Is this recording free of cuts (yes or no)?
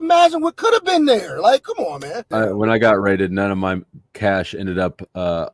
no